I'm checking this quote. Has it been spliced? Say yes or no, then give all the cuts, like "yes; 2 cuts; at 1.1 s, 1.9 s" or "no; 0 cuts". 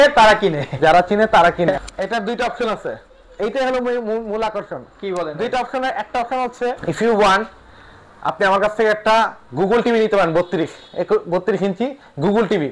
yes; 2 cuts; at 1.7 s, 6.8 s